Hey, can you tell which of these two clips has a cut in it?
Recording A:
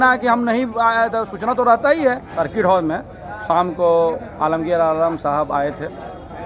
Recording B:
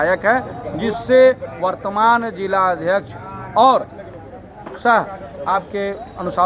A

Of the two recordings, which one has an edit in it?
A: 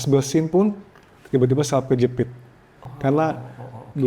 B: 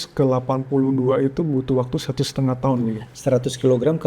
A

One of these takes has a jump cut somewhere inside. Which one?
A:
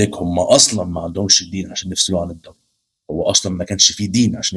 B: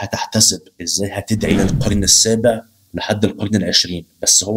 B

